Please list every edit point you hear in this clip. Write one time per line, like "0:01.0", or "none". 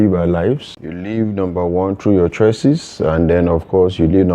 0:01.1